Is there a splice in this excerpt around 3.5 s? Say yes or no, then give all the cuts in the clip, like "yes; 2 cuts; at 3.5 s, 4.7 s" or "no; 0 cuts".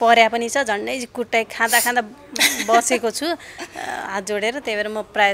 no; 0 cuts